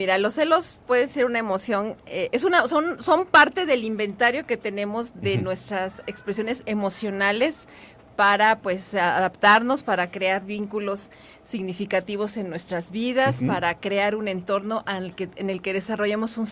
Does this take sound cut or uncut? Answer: uncut